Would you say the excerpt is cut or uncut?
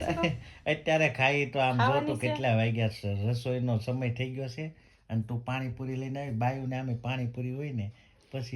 uncut